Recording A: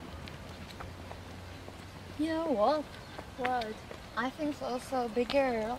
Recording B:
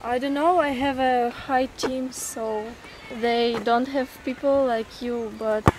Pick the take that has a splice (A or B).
B